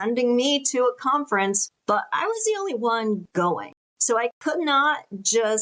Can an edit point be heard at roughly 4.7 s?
no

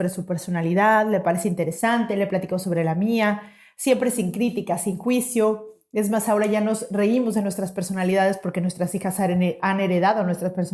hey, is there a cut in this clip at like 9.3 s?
no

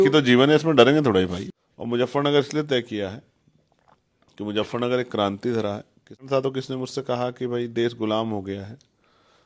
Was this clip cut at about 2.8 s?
no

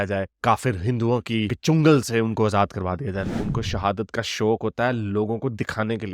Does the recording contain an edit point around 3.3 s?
yes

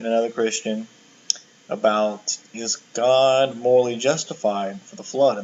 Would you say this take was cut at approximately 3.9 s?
yes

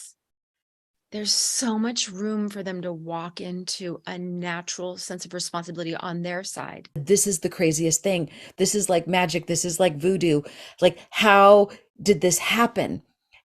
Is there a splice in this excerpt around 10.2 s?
no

